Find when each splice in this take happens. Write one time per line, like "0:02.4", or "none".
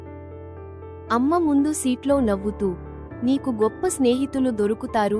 0:01.1